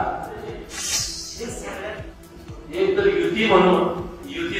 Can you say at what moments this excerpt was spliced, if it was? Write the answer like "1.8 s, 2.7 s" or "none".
2.0 s